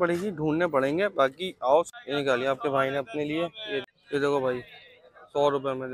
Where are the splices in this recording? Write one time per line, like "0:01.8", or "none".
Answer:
0:01.9
0:03.9